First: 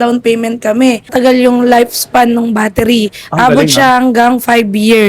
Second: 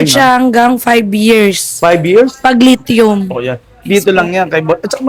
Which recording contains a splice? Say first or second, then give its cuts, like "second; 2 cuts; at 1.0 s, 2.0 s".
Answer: first; 1 cut; at 1.1 s